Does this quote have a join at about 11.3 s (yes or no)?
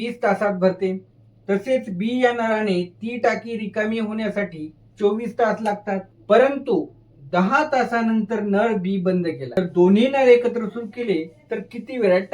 no